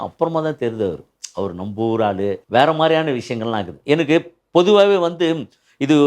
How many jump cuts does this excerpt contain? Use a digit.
1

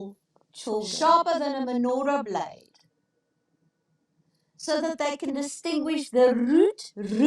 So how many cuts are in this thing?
1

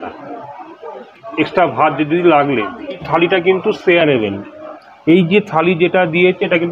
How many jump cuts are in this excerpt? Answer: 1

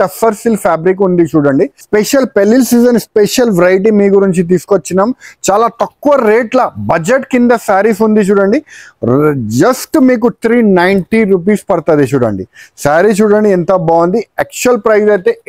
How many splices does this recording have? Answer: 1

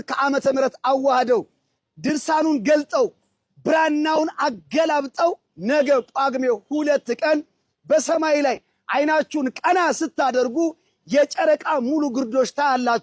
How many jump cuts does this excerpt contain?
0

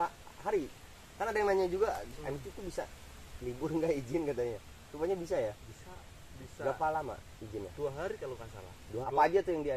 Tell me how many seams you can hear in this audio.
1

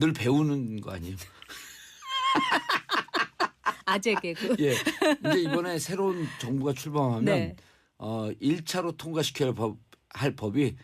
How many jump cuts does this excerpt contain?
1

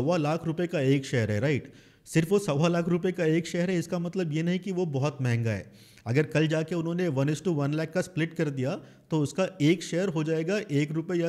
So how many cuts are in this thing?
0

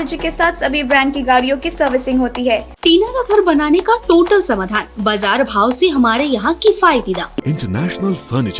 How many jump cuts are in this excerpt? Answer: 2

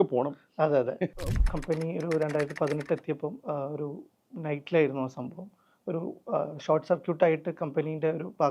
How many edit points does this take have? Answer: 1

